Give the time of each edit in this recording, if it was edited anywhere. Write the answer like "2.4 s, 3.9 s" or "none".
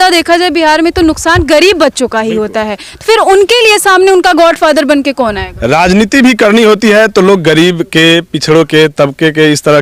none